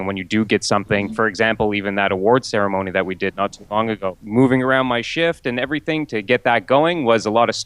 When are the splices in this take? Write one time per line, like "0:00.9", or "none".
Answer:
0:01.1
0:04.2